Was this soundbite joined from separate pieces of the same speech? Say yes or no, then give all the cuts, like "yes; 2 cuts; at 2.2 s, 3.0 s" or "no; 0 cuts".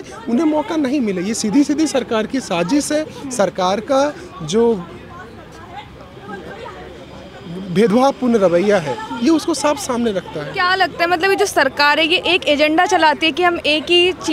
no; 0 cuts